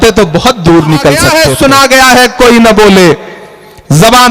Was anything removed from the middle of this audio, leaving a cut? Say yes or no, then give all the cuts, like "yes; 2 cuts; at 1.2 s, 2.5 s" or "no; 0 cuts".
yes; 1 cut; at 1.3 s